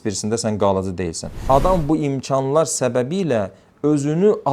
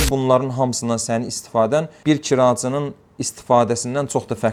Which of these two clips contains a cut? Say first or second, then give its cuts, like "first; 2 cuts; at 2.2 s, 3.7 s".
first; 1 cut; at 1.3 s